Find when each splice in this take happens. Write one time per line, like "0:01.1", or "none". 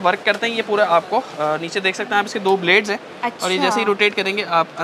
none